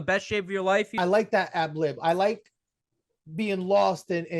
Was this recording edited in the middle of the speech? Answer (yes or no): yes